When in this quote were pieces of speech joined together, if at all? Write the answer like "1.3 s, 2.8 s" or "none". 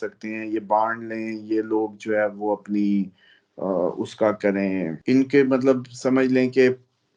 5.0 s